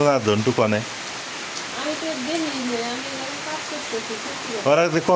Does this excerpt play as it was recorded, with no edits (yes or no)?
yes